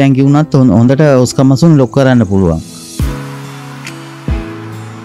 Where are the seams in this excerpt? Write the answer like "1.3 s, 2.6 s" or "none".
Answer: none